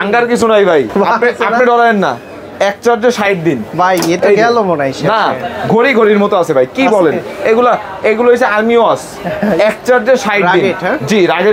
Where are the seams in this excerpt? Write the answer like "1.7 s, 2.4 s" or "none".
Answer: none